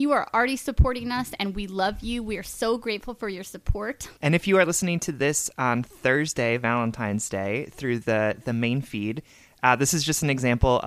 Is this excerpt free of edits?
no; 1 cut; at 4.1 s

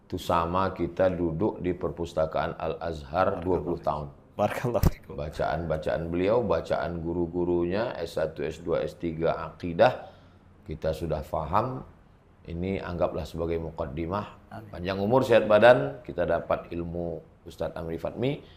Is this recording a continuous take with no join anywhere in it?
yes; 0 cuts

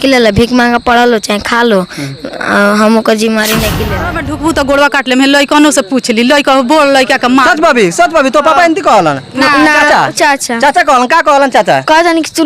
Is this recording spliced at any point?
yes; 1 cut; at 3.9 s

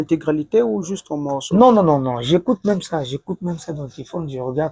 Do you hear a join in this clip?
no; 0 cuts

